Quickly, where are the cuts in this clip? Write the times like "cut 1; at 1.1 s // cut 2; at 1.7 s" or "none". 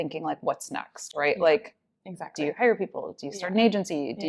none